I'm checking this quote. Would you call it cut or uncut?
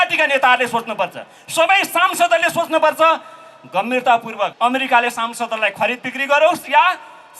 cut